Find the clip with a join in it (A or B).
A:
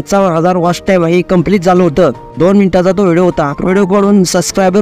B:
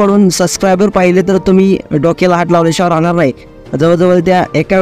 A